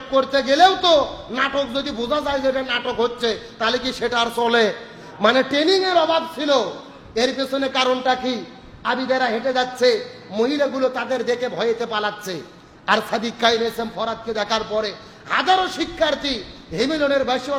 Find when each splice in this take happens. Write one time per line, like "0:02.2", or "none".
none